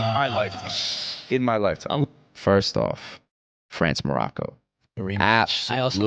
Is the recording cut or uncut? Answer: cut